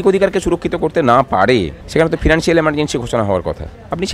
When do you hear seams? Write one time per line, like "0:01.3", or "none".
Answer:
0:01.8